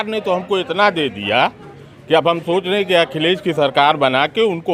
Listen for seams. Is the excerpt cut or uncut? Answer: uncut